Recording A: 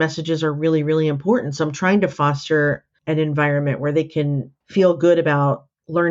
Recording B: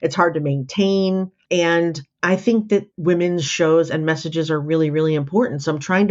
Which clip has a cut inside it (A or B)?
B